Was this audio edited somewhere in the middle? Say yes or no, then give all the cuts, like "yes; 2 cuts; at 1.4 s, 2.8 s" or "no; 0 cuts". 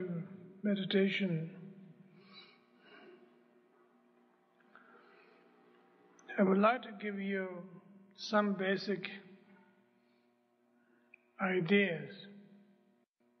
yes; 1 cut; at 1.6 s